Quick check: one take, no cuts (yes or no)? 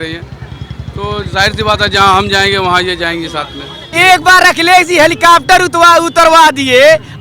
no